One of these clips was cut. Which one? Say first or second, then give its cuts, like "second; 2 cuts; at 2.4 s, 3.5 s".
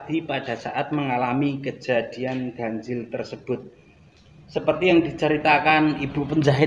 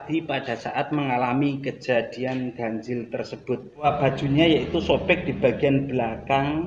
second; 1 cut; at 3.9 s